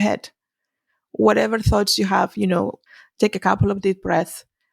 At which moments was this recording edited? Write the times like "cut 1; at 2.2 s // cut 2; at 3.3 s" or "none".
cut 1; at 2.8 s